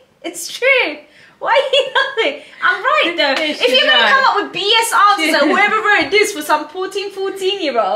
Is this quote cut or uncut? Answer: uncut